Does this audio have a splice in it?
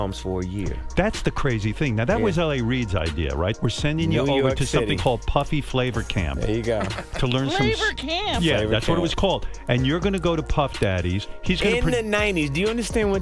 no; 0 cuts

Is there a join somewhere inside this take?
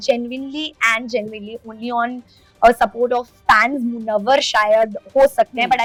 no; 0 cuts

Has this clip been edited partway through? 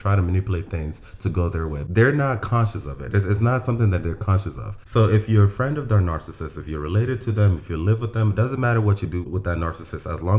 yes; 1 cut; at 1.8 s

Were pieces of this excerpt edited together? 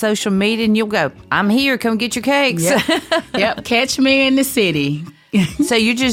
no; 0 cuts

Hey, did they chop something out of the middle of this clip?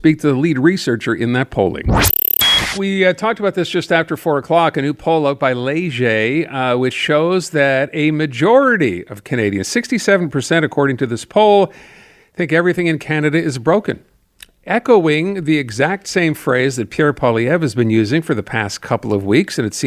no; 0 cuts

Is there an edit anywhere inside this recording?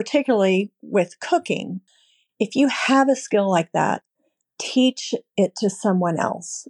yes; 1 cut; at 1.8 s

